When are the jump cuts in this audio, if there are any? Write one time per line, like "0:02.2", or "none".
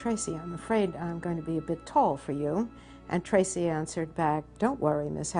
none